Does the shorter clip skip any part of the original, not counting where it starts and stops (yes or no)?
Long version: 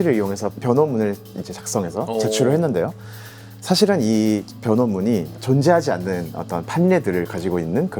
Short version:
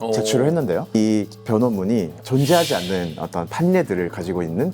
yes